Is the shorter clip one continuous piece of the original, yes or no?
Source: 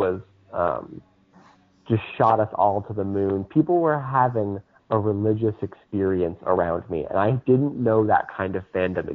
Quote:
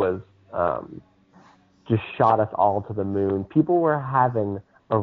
yes